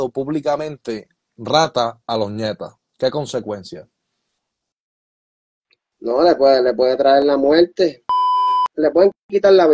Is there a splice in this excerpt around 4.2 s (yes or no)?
no